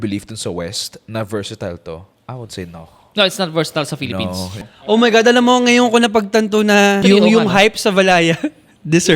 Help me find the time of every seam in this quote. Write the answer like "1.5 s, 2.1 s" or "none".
4.6 s, 7.0 s